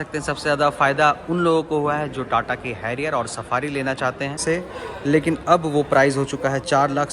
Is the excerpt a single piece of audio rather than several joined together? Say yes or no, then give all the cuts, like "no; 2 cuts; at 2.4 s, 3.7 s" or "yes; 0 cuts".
no; 1 cut; at 4.4 s